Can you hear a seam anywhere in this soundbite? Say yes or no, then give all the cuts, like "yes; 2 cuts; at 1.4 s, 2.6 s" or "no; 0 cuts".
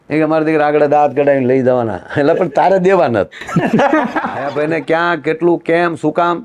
yes; 1 cut; at 4.5 s